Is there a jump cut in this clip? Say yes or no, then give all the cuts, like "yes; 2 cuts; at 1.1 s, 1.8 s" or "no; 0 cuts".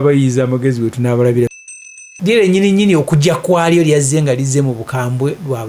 yes; 1 cut; at 1.5 s